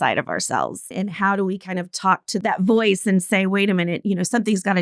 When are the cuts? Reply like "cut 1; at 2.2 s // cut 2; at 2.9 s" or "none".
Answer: cut 1; at 0.9 s // cut 2; at 2.4 s